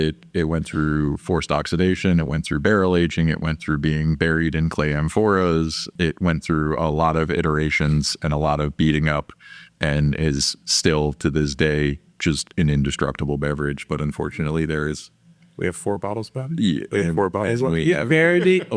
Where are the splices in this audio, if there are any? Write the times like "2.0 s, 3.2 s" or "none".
5.9 s